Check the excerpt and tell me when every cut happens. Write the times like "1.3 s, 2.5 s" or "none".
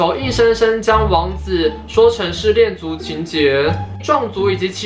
3.9 s